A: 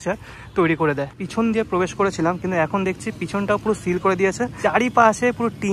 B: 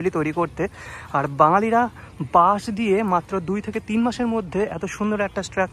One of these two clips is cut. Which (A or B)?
A